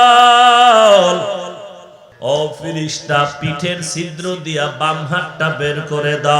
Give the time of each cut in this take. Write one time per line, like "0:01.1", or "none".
0:02.0